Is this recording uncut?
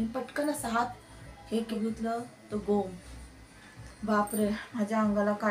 no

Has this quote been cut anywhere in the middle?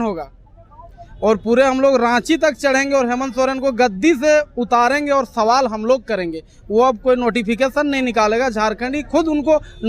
no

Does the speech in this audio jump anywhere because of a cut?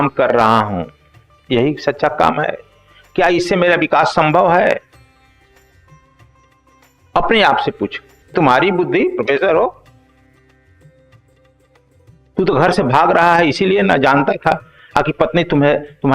yes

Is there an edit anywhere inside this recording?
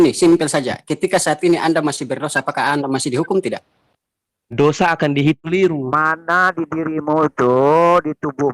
yes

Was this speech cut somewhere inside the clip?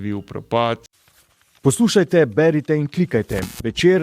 yes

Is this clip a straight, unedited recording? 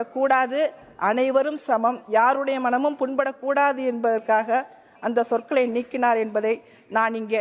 yes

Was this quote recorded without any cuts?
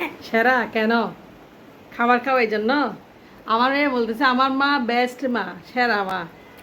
yes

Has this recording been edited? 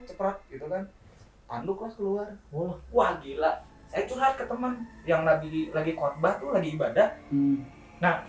no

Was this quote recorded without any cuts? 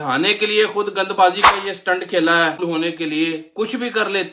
no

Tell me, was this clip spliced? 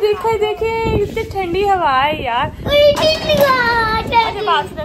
no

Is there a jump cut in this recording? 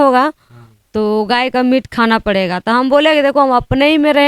no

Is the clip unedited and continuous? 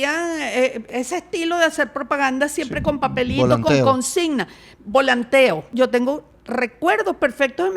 no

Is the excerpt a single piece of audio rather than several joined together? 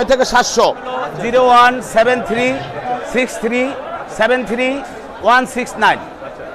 no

